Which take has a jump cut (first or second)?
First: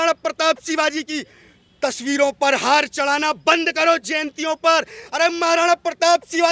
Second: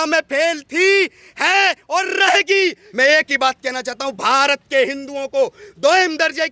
second